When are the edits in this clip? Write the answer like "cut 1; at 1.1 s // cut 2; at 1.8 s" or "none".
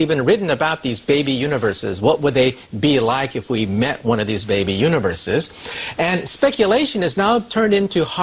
none